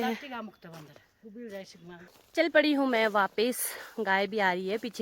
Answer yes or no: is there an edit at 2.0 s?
yes